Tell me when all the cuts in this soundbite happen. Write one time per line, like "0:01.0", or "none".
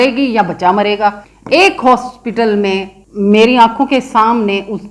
0:01.3
0:03.0